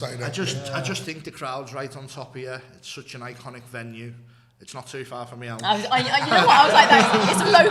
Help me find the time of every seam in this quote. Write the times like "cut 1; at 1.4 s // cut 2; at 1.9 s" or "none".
none